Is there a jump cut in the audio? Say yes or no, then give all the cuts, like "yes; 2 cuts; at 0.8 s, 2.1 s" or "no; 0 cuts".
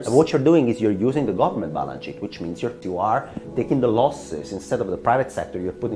yes; 1 cut; at 2.8 s